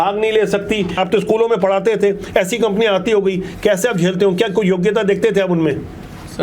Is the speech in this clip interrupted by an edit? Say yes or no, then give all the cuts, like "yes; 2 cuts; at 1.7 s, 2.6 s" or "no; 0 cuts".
yes; 1 cut; at 1.0 s